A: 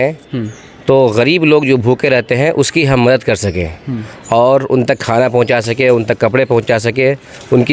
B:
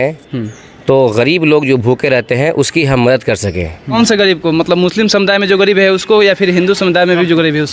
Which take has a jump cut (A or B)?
B